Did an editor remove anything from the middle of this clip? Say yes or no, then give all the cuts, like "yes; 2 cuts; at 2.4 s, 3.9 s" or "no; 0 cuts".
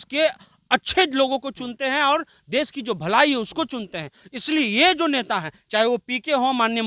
no; 0 cuts